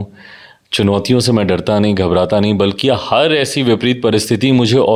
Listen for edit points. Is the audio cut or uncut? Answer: uncut